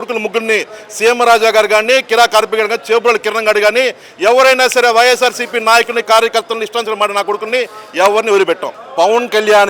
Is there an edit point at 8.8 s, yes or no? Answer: yes